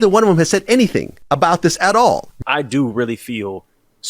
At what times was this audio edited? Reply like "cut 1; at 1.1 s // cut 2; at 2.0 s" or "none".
cut 1; at 2.4 s